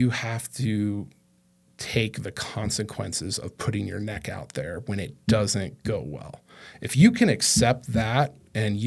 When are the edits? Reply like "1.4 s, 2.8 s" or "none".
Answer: none